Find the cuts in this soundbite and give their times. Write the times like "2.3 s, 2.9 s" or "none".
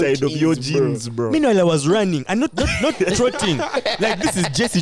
none